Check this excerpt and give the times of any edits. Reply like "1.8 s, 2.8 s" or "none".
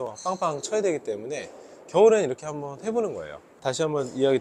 none